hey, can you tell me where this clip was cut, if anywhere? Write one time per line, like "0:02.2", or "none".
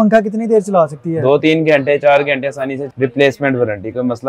0:02.8